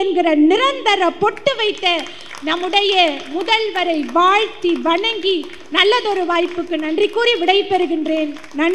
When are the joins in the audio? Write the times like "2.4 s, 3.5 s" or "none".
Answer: none